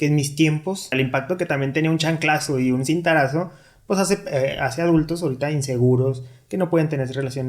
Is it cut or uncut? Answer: cut